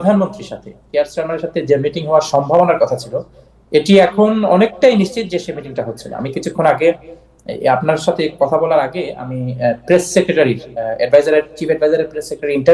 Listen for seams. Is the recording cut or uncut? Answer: cut